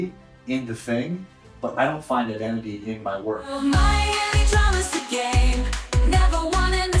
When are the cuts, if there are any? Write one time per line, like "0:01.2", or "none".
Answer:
0:03.5

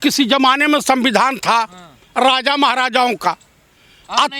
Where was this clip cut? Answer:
none

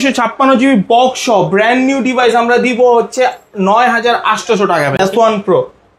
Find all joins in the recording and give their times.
0:04.9

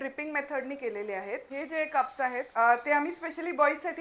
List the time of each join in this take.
0:01.5
0:02.5

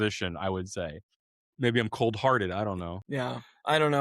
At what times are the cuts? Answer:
0:01.4
0:02.8

